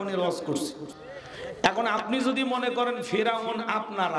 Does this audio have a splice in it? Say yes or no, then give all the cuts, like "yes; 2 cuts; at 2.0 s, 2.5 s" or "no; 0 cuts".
no; 0 cuts